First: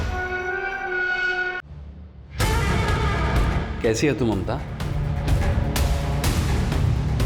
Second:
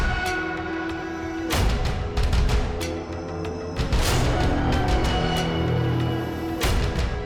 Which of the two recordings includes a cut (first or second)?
first